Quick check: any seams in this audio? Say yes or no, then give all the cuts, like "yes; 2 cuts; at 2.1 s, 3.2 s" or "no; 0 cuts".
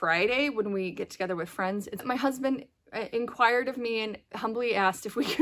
yes; 1 cut; at 2.0 s